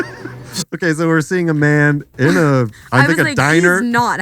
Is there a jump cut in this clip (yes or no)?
no